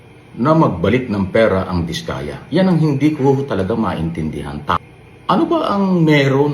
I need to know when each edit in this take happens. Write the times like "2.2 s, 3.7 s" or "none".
4.8 s